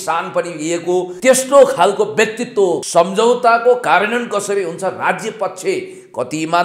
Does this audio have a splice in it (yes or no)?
yes